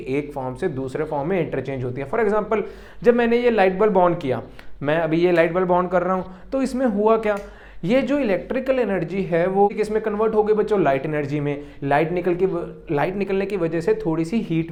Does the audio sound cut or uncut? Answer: uncut